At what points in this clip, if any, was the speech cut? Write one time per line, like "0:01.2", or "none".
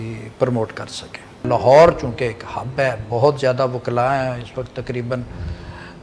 0:01.4